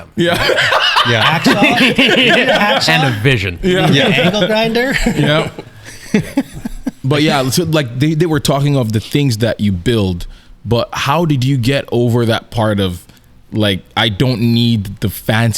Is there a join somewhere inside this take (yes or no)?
no